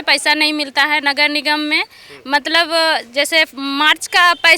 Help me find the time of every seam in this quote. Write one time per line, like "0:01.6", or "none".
none